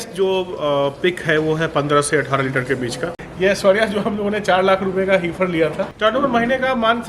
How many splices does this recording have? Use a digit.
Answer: 2